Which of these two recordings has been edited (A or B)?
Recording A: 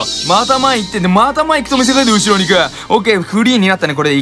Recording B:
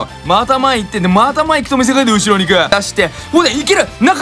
B